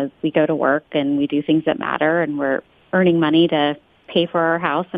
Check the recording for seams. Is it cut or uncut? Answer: uncut